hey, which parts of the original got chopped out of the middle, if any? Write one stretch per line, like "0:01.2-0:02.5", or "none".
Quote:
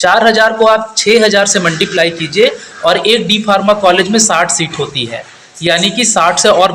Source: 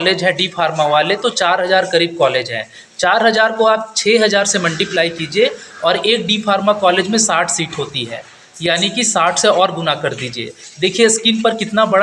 none